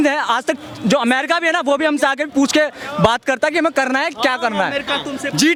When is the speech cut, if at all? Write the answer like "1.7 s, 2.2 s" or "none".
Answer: none